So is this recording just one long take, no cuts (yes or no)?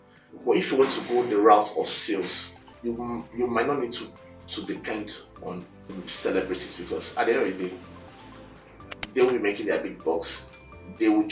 no